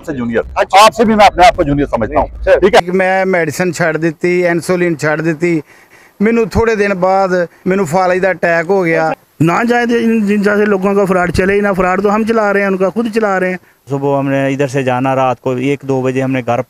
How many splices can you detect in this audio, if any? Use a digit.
2